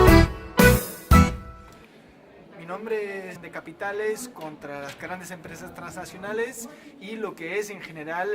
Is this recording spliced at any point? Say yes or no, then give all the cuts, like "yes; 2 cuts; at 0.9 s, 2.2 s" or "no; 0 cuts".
no; 0 cuts